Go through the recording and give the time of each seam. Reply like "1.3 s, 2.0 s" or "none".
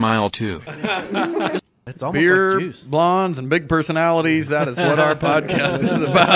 1.6 s